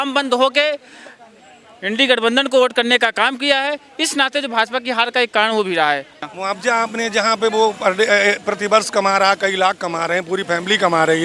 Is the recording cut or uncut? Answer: cut